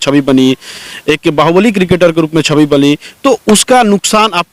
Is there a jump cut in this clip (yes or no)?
no